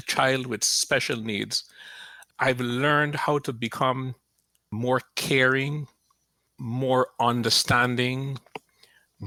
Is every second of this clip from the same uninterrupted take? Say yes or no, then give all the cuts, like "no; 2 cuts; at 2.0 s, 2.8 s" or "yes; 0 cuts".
yes; 0 cuts